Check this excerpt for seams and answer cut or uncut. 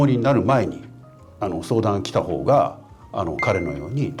uncut